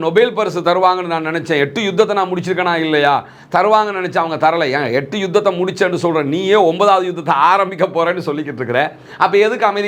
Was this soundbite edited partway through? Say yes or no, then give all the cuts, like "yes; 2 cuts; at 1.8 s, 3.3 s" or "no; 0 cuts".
no; 0 cuts